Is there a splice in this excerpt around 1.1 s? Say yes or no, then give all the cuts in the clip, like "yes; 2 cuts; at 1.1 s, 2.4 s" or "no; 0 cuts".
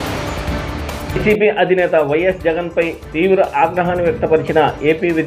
yes; 1 cut; at 1.1 s